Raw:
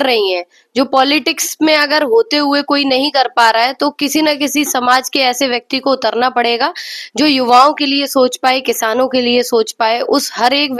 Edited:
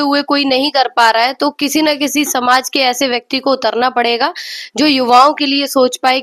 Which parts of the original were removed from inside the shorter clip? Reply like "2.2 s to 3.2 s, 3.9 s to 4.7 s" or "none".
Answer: none